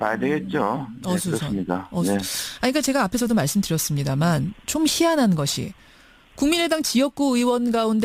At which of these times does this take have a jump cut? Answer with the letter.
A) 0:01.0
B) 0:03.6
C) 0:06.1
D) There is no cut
D